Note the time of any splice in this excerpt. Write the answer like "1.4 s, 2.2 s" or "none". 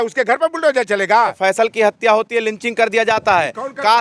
1.4 s